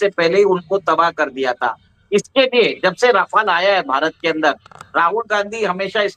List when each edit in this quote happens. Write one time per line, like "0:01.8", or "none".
none